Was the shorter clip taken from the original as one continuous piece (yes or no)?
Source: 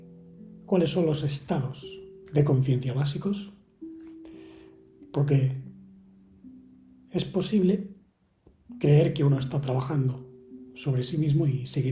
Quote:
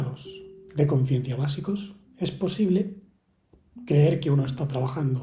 no